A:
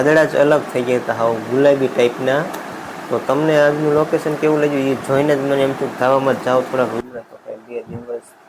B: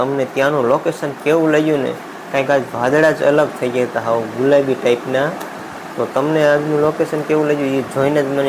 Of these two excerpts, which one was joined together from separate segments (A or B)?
A